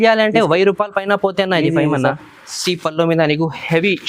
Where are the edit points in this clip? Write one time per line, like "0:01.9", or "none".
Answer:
0:02.5